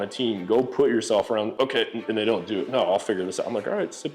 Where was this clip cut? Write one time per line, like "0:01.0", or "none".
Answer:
0:01.5